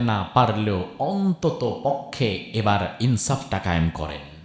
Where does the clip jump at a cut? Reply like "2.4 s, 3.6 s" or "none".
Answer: none